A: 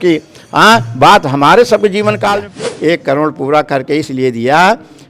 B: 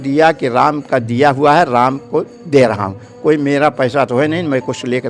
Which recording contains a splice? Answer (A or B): A